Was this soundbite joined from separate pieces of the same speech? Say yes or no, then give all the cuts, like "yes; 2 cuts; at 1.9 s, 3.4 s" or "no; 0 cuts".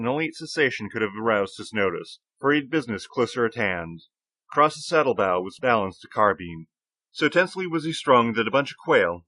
yes; 1 cut; at 7.5 s